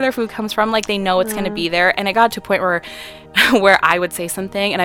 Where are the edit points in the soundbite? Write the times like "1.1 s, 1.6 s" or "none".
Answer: none